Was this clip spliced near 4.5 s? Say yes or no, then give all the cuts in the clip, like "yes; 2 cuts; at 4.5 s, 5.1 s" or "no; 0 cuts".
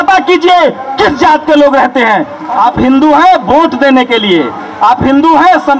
no; 1 cut; at 2.4 s